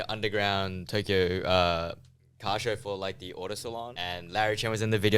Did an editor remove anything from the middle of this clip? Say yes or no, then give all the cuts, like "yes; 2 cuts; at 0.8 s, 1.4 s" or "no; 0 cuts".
yes; 1 cut; at 3.9 s